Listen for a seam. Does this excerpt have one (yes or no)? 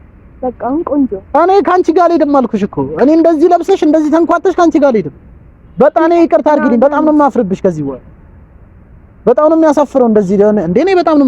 no